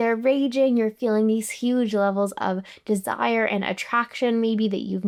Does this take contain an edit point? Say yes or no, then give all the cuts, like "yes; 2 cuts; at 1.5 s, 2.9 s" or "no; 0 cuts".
no; 0 cuts